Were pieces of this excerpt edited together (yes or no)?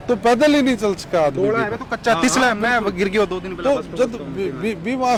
no